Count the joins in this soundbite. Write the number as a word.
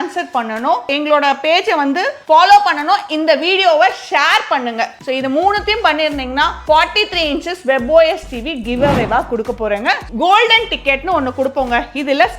one